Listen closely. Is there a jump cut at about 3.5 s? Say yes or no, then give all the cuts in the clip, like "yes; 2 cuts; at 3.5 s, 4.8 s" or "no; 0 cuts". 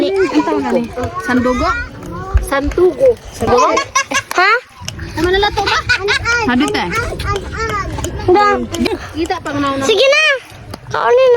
yes; 2 cuts; at 3.5 s, 8.9 s